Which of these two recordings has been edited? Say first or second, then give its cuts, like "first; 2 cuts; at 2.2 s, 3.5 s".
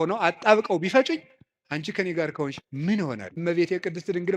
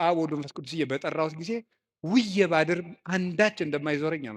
first; 1 cut; at 3.3 s